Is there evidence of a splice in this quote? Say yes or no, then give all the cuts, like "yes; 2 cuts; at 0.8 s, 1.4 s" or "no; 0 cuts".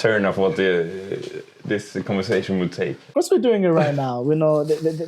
yes; 1 cut; at 3.1 s